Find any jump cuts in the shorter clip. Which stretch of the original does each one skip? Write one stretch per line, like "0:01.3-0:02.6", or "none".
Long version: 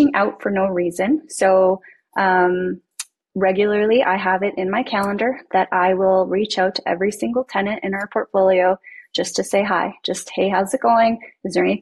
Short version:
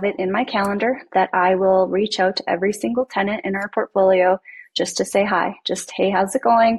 none